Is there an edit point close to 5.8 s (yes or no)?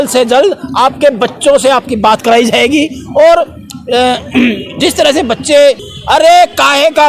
yes